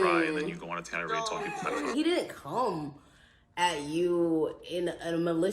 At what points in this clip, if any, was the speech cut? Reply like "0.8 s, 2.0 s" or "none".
1.9 s